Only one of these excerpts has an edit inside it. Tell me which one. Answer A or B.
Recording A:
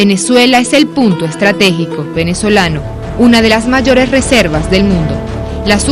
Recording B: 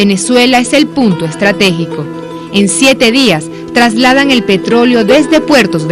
B